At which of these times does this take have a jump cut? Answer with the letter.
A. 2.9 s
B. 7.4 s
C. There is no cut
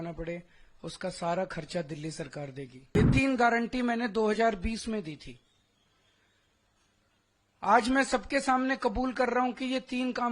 A